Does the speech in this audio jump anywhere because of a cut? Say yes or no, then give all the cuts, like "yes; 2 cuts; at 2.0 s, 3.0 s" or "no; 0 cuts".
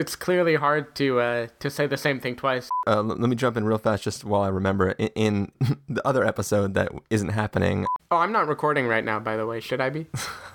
yes; 3 cuts; at 2.7 s, 5.5 s, 8.1 s